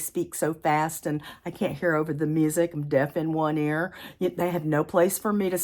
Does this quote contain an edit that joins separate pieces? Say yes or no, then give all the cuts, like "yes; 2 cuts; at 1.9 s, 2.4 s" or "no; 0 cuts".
no; 0 cuts